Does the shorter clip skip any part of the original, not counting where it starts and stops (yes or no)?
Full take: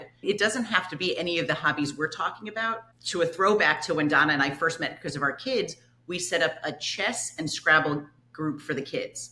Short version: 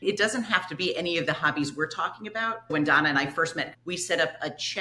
yes